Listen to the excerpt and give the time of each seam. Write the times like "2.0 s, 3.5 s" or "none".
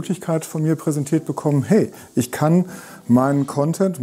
none